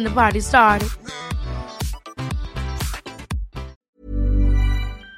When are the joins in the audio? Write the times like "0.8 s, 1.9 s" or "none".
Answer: 3.8 s